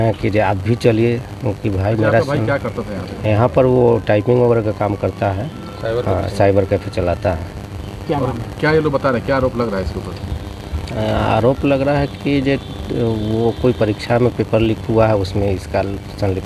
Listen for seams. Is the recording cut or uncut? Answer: uncut